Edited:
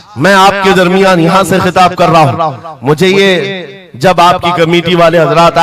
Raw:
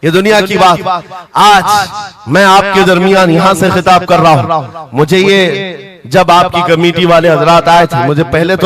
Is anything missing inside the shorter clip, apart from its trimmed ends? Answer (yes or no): no